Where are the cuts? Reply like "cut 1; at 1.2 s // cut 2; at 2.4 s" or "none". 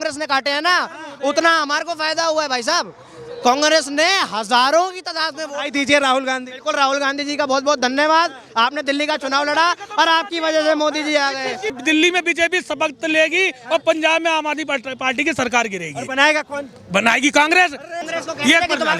cut 1; at 11.7 s // cut 2; at 18.0 s